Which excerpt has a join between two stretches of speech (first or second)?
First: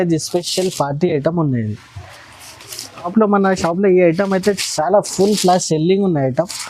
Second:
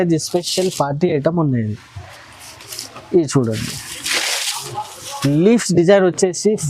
first